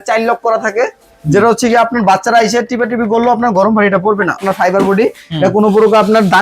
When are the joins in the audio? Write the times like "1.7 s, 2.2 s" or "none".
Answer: 4.4 s